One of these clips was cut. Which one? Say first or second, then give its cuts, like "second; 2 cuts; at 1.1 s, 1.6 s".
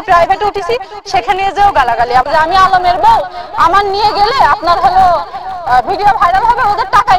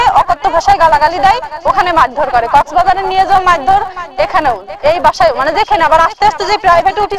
first; 1 cut; at 2.2 s